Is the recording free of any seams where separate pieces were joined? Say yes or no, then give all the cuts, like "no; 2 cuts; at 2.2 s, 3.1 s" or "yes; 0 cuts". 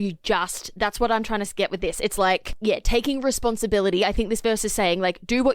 no; 1 cut; at 2.5 s